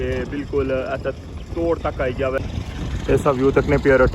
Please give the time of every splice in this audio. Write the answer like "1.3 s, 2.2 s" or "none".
2.4 s